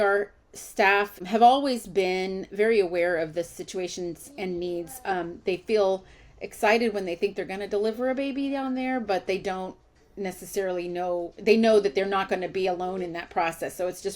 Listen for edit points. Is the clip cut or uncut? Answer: cut